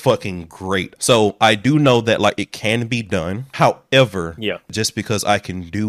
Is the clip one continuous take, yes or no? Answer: no